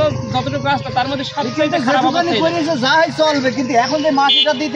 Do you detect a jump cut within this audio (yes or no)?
no